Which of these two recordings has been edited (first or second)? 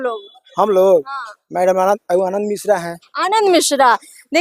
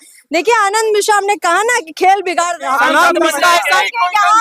second